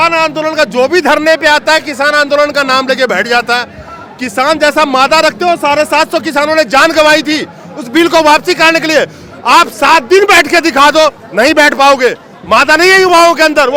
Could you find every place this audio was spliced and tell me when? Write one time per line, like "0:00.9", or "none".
none